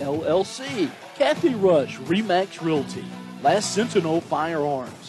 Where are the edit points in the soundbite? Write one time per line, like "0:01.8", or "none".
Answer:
0:01.0

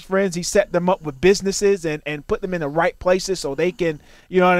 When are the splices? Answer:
none

